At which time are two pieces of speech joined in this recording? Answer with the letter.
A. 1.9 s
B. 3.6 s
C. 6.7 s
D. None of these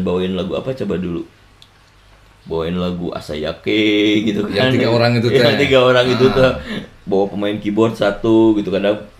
D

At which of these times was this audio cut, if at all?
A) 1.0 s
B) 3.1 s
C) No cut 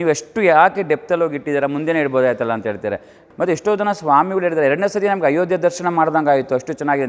B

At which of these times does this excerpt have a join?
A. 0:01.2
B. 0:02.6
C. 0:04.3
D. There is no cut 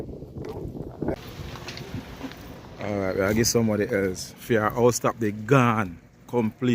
A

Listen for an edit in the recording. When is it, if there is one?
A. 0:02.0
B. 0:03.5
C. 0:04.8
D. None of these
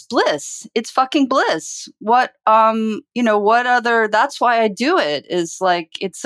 D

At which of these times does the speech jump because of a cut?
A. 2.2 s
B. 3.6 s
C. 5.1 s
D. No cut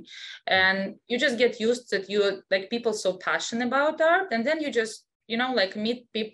D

